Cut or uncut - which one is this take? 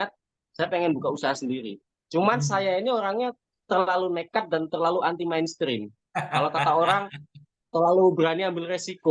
uncut